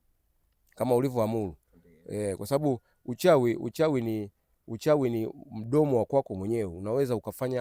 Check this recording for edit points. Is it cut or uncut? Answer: uncut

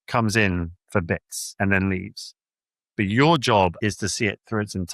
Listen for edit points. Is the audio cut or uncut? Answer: cut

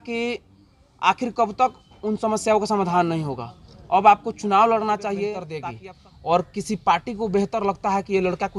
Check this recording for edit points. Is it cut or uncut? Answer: cut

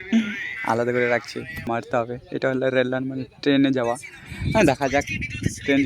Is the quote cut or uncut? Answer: cut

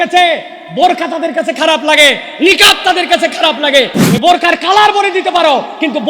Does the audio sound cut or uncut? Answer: cut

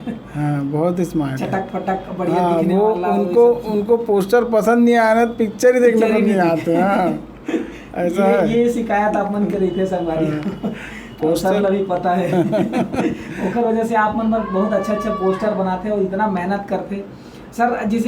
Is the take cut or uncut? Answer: uncut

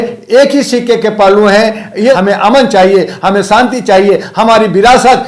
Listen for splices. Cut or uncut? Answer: cut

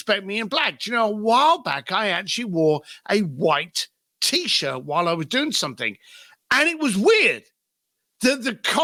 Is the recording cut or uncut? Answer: uncut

